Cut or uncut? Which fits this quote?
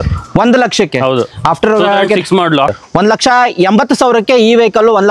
cut